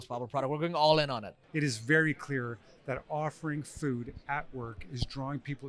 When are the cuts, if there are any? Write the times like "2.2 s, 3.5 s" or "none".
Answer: 1.3 s